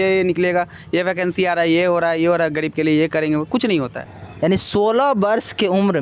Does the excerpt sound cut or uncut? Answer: cut